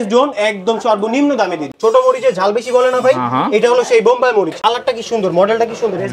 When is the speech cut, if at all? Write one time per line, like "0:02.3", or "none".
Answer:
0:01.7
0:04.6